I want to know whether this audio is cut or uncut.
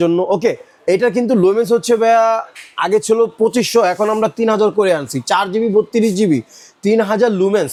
uncut